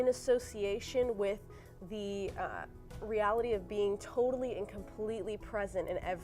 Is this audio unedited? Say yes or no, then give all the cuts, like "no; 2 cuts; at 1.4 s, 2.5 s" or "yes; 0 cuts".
yes; 0 cuts